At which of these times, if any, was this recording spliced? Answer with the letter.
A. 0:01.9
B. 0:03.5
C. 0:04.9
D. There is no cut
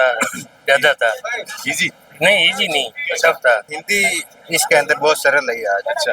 D